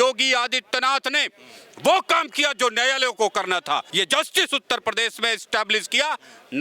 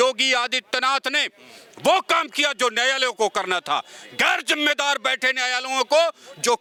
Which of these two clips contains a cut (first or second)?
first